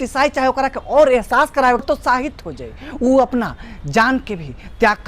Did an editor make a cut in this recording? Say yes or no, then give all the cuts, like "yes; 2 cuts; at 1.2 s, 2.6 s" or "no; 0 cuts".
yes; 1 cut; at 1.8 s